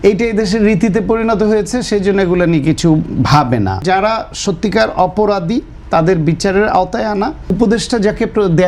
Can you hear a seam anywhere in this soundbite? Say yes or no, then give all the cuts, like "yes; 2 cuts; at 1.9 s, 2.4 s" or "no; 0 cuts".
yes; 2 cuts; at 3.8 s, 7.5 s